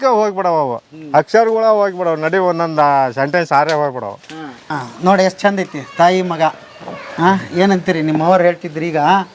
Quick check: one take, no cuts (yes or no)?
no